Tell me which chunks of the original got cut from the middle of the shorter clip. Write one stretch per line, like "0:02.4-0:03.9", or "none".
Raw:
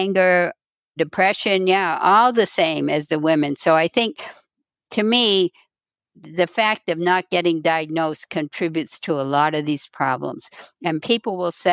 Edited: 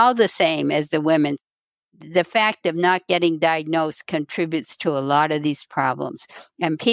0:03.6-0:05.6

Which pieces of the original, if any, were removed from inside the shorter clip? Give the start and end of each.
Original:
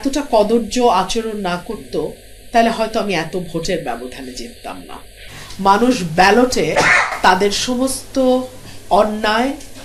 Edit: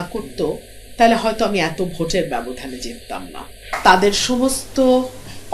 0:05.2-0:07.1

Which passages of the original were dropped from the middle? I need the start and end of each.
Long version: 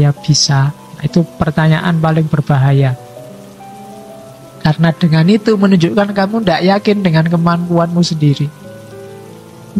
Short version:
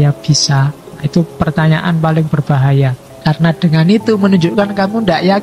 0:03.1-0:04.4

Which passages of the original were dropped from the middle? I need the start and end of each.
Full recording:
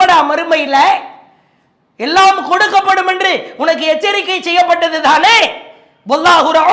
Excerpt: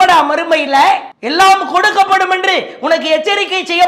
0:01.2-0:01.9

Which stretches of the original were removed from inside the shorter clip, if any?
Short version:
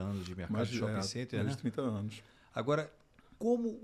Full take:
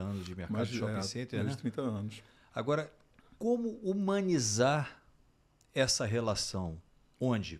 none

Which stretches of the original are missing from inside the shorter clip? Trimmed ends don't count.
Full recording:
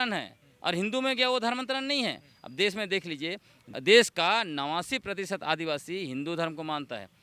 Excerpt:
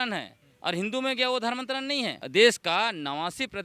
0:02.2-0:03.7

